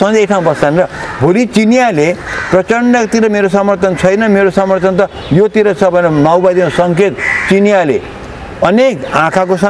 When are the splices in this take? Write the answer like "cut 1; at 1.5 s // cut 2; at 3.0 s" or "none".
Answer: none